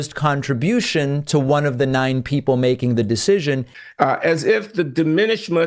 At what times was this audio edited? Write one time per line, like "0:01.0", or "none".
0:03.7

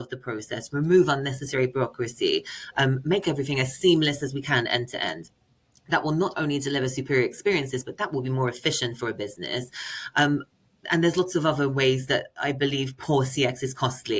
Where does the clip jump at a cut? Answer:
none

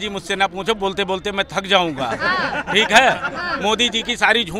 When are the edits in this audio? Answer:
none

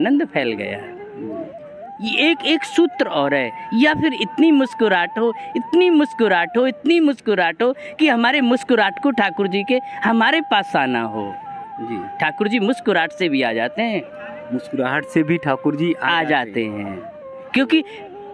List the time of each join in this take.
0:01.9

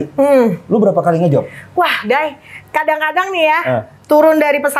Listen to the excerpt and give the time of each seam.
none

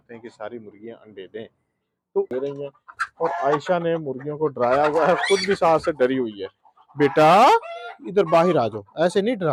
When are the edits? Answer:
0:02.3

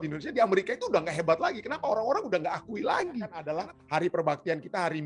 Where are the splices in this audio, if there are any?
0:03.4

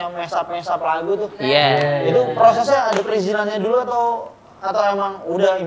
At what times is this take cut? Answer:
none

